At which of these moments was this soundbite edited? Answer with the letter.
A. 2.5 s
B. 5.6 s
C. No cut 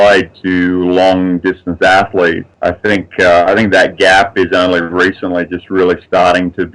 A